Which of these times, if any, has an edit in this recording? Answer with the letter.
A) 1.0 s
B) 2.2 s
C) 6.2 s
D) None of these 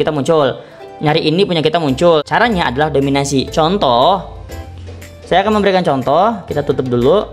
B